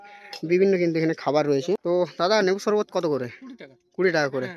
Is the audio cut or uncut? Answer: cut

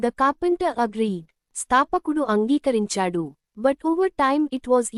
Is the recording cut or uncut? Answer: uncut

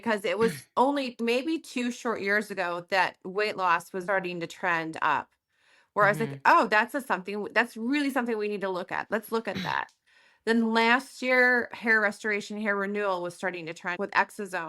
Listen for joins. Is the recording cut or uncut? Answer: cut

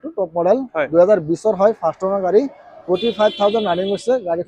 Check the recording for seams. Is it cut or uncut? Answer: uncut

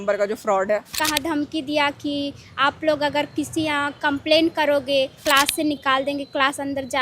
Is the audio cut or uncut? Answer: cut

